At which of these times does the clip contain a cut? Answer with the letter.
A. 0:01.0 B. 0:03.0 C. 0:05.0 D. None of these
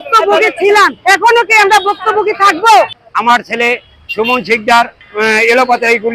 C